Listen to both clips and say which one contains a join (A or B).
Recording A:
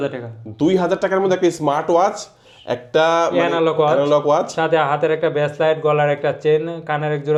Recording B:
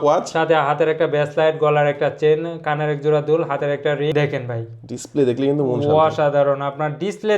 B